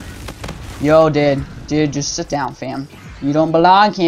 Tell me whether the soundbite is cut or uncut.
uncut